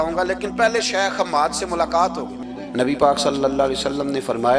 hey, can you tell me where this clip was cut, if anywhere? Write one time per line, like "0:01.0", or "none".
0:02.4